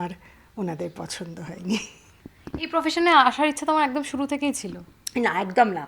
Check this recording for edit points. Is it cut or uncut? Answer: uncut